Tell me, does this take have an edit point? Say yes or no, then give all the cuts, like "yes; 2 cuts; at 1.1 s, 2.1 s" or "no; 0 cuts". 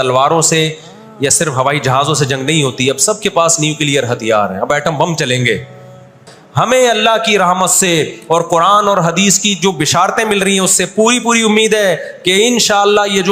yes; 1 cut; at 6.4 s